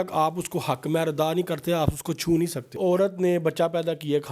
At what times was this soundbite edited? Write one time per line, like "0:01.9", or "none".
0:02.7